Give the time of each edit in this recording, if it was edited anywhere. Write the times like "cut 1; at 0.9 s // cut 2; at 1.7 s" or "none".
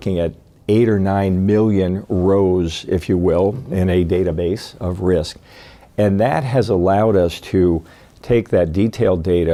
none